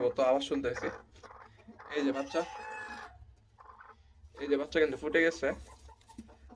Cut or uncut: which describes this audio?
uncut